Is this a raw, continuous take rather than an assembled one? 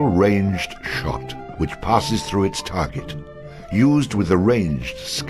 yes; 0 cuts

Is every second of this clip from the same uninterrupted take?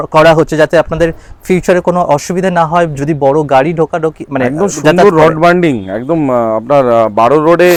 yes; 0 cuts

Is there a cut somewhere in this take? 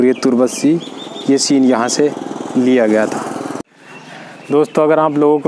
no; 0 cuts

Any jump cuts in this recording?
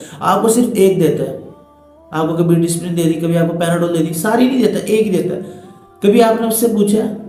no; 0 cuts

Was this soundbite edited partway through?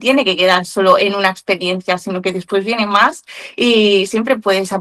no; 0 cuts

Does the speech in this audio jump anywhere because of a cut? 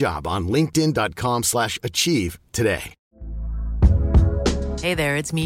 no; 0 cuts

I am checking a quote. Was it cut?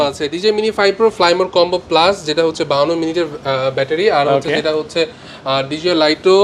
no; 0 cuts

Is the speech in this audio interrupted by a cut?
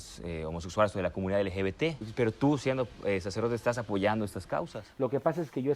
yes; 2 cuts; at 2.0 s, 4.8 s

